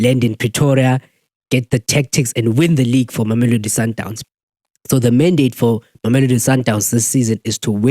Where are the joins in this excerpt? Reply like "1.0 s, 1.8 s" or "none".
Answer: 4.1 s